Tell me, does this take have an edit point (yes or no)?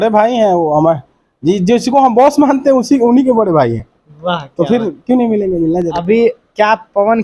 no